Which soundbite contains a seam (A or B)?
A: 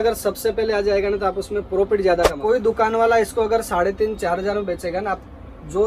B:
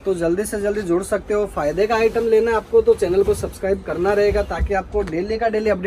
A